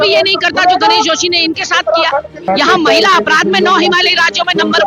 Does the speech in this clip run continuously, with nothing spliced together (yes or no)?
no